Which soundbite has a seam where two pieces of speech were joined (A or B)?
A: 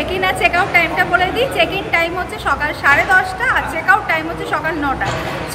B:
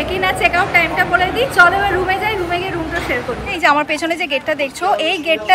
B